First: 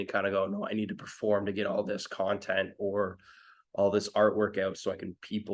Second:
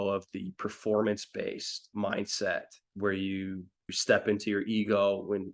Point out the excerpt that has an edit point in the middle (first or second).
second